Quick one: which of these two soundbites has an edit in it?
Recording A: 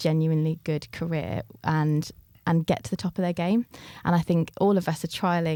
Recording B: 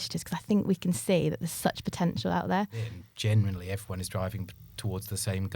B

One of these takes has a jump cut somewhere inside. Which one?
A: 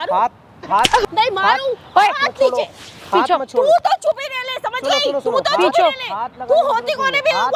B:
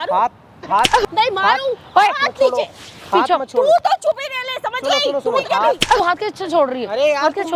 B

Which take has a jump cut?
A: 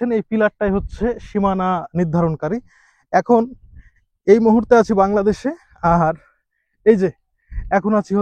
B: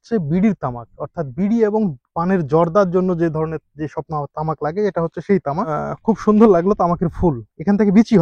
B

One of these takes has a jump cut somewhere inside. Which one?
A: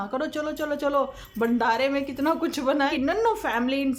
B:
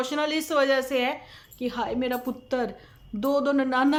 A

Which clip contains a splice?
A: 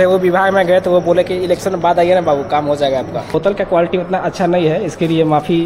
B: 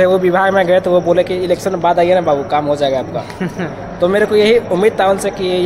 A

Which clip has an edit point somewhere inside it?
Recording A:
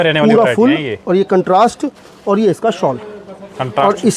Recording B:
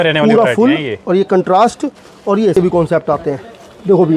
B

